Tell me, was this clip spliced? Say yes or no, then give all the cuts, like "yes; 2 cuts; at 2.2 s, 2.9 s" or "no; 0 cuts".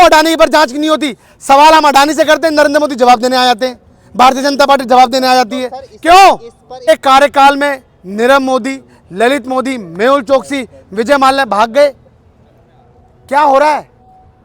yes; 1 cut; at 6.8 s